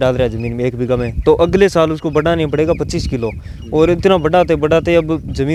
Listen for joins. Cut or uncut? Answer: uncut